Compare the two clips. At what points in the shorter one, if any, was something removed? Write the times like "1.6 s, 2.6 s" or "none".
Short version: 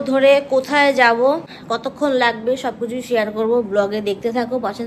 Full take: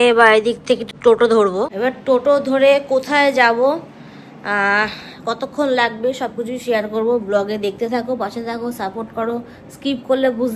1.5 s